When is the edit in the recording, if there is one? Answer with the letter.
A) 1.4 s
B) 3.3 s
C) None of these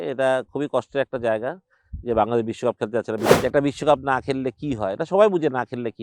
B